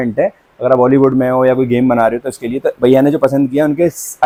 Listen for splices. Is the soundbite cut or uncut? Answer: uncut